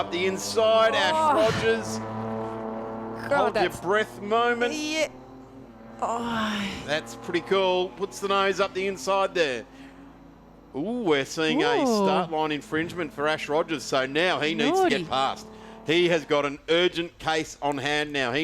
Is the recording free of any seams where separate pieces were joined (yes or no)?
yes